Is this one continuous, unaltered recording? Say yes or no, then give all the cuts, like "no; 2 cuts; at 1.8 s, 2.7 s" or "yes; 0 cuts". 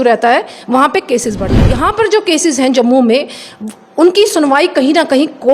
no; 1 cut; at 1.7 s